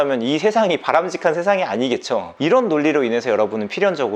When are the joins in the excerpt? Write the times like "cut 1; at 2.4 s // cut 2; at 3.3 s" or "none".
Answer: cut 1; at 2.3 s